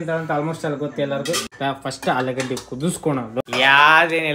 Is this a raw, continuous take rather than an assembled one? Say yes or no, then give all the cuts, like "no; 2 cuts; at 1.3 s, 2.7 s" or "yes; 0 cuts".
no; 2 cuts; at 1.5 s, 3.4 s